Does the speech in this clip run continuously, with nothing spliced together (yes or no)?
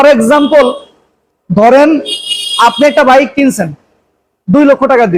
yes